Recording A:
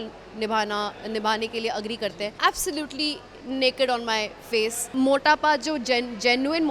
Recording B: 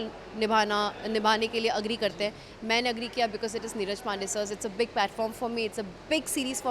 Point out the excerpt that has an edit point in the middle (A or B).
A